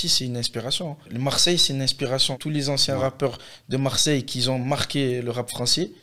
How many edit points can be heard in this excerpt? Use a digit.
2